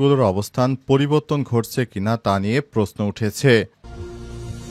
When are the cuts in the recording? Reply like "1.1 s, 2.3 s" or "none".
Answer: 3.7 s